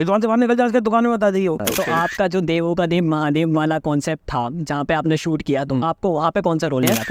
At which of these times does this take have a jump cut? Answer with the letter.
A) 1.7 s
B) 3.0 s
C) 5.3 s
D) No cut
A